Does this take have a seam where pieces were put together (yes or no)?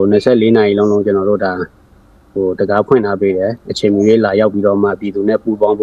no